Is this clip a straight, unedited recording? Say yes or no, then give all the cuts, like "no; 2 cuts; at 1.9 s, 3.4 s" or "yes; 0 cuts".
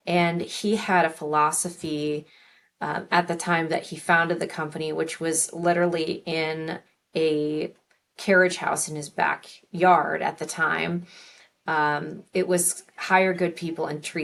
yes; 0 cuts